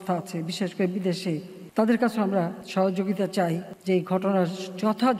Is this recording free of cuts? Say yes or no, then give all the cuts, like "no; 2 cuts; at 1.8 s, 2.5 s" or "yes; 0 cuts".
no; 3 cuts; at 1.6 s, 2.6 s, 3.7 s